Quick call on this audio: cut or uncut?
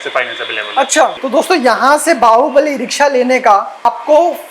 cut